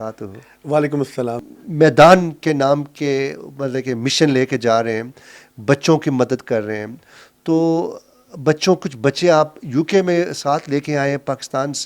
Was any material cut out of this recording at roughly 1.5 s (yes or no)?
yes